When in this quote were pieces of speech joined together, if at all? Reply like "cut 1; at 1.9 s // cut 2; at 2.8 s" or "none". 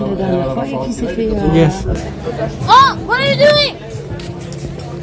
cut 1; at 1.9 s